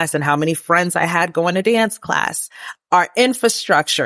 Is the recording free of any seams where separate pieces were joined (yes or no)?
no